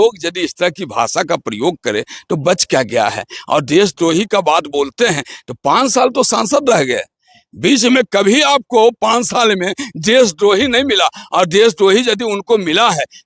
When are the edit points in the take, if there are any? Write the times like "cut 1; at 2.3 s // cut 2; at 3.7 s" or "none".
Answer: none